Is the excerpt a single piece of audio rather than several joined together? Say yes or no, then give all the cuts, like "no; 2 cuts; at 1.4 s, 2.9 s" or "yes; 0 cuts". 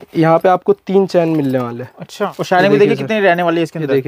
no; 1 cut; at 2.4 s